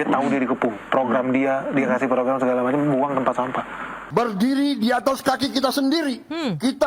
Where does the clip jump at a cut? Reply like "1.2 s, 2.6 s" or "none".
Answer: 4.1 s